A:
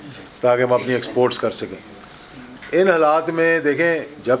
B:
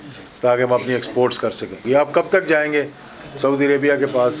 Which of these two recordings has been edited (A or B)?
B